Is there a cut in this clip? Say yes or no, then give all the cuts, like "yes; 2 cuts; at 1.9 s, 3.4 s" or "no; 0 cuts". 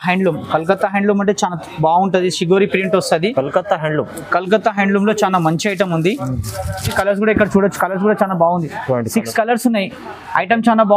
yes; 1 cut; at 6.9 s